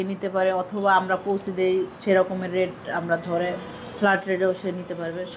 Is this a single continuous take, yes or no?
yes